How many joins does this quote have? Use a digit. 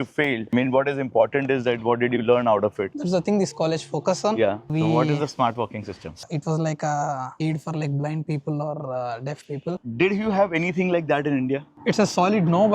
3